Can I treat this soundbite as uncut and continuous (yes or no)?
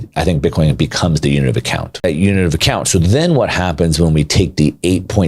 no